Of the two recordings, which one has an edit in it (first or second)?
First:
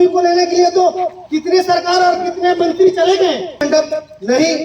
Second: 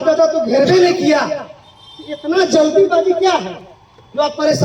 first